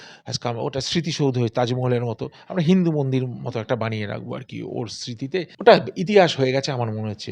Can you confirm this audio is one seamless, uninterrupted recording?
yes; 0 cuts

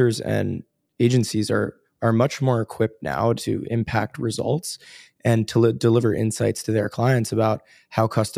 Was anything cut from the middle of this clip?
no; 0 cuts

